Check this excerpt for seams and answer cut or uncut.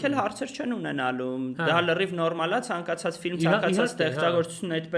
uncut